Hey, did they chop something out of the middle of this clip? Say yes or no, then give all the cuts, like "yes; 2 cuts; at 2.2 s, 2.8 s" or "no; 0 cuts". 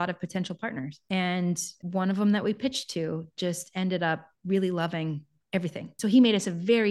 yes; 3 cuts; at 0.9 s, 1.8 s, 5.9 s